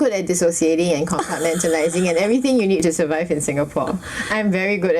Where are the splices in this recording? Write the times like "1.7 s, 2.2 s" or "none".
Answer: none